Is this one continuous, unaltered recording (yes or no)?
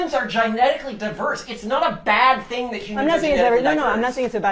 yes